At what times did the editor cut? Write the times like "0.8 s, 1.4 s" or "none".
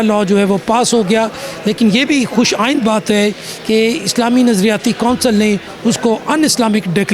none